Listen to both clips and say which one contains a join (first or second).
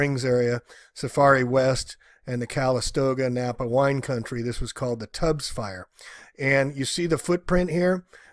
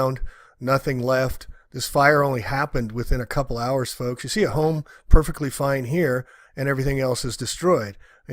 second